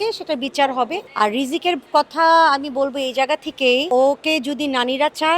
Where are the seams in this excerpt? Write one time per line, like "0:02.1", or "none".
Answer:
0:01.0
0:03.9

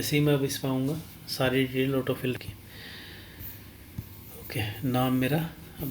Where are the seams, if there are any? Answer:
0:02.4

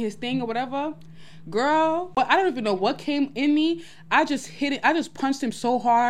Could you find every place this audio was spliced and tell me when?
0:02.1

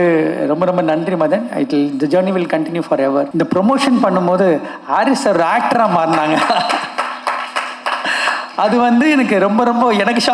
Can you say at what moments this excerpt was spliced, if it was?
0:03.3

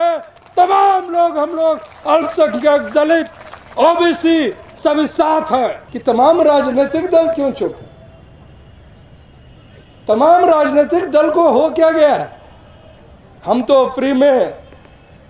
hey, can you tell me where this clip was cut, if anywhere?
0:05.9

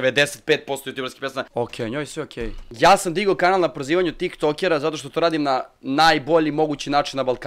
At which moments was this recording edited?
0:01.5
0:02.7

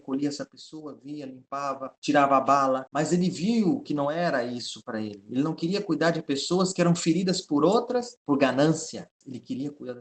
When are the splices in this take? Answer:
0:01.9
0:02.9
0:08.1
0:09.2

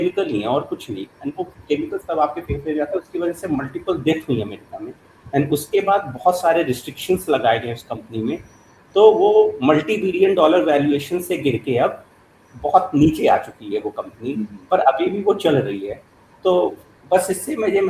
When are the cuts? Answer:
none

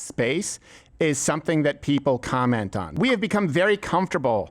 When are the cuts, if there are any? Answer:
0:02.8

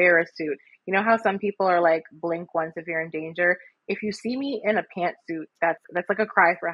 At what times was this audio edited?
0:05.8

